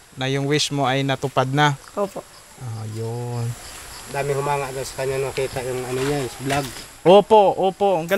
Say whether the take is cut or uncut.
uncut